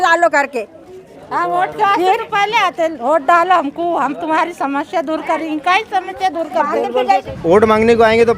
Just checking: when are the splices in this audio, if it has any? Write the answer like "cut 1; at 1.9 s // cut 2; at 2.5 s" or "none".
cut 1; at 7.3 s